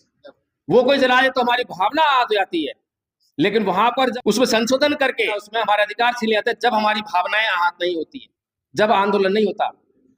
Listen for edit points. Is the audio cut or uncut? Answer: cut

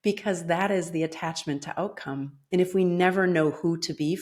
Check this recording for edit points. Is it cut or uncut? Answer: uncut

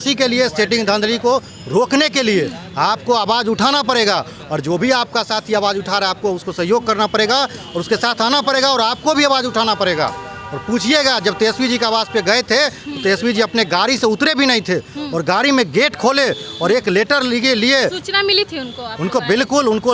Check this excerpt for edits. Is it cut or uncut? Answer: uncut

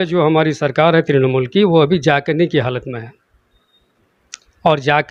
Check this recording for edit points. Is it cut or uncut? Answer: uncut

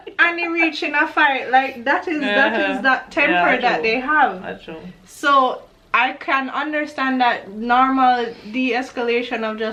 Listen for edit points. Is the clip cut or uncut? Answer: uncut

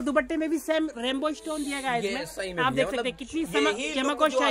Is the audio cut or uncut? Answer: uncut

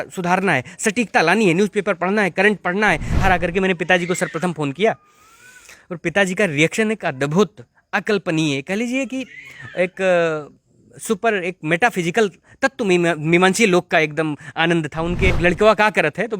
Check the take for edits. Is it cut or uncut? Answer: cut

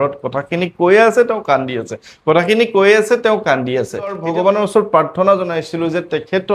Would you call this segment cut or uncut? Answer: cut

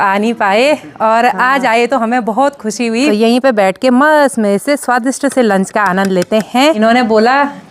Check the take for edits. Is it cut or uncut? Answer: cut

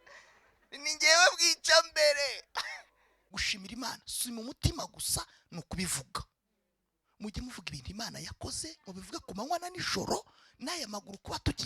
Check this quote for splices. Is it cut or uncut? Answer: cut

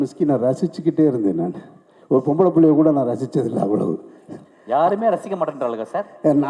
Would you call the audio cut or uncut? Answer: uncut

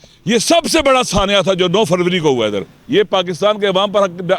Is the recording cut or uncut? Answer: cut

